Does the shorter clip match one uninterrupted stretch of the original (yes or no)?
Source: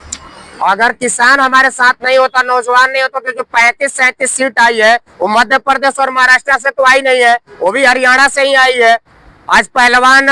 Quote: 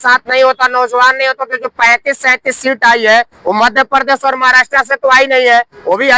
yes